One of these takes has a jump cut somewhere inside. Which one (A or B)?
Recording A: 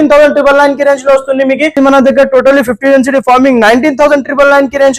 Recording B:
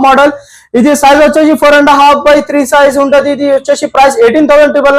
A